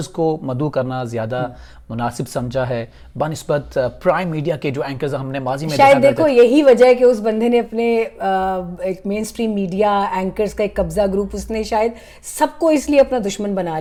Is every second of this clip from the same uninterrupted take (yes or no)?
yes